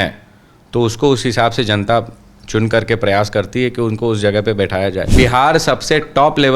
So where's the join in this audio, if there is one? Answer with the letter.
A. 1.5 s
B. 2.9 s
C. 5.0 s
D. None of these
C